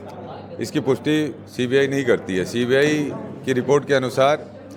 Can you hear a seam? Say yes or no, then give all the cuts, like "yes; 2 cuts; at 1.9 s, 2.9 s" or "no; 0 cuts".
no; 0 cuts